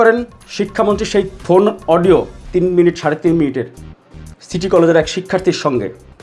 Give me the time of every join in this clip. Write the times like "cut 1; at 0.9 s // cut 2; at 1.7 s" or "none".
cut 1; at 1.3 s // cut 2; at 2.4 s